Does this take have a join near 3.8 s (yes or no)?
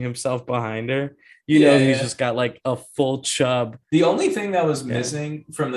yes